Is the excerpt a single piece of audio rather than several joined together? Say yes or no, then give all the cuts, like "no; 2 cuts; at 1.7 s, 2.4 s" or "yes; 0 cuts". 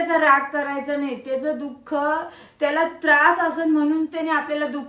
yes; 0 cuts